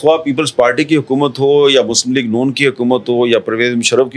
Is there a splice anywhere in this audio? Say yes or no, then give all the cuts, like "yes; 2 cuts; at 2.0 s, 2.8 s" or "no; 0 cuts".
no; 0 cuts